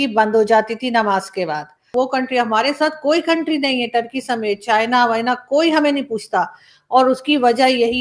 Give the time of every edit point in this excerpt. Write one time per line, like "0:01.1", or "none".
0:01.9